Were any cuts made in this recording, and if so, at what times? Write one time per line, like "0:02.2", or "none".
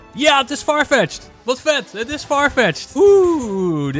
0:02.8